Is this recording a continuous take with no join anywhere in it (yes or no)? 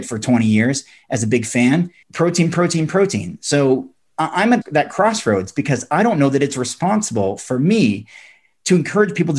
no